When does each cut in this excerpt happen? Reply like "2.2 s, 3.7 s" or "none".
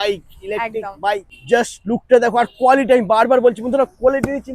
1.3 s